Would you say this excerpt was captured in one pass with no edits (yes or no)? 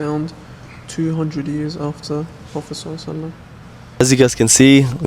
no